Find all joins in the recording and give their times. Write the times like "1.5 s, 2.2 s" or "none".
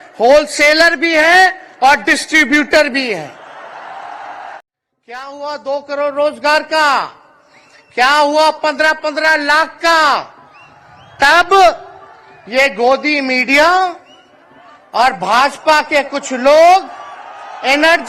4.6 s

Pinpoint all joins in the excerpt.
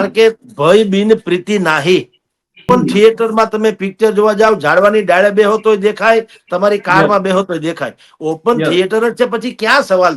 2.5 s

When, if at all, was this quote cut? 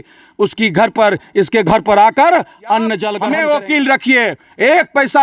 3.1 s

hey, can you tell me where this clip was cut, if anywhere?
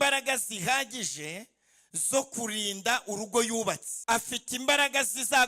3.9 s

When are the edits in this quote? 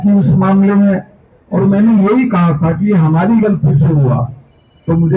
none

